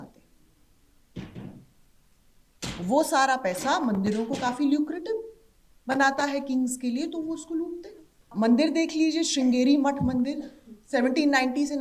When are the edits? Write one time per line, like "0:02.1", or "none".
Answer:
0:08.3